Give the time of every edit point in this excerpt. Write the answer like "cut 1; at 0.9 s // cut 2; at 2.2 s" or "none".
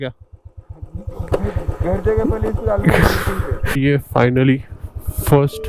cut 1; at 3.6 s